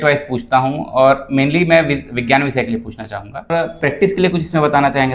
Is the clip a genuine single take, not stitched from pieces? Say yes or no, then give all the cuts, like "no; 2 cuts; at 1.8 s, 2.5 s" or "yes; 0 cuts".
no; 1 cut; at 3.5 s